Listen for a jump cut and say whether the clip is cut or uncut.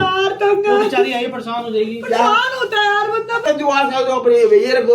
cut